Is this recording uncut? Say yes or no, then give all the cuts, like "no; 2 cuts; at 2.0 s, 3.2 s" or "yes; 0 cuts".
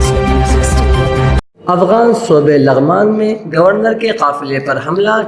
no; 1 cut; at 1.4 s